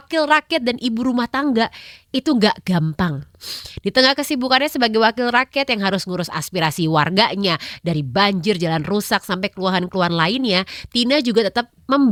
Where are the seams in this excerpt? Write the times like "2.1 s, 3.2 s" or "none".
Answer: none